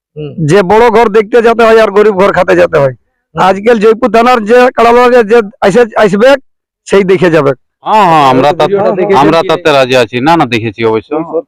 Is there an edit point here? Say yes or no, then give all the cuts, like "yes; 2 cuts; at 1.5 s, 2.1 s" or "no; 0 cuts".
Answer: yes; 1 cut; at 7.9 s